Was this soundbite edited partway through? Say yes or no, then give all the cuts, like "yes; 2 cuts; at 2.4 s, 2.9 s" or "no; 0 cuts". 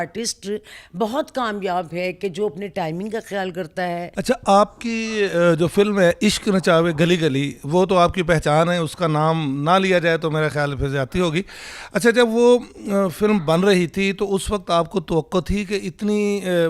no; 0 cuts